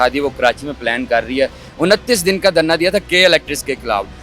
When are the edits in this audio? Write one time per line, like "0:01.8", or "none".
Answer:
0:01.6